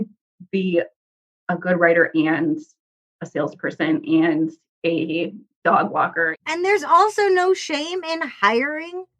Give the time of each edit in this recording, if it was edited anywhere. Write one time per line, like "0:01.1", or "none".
0:05.5
0:06.4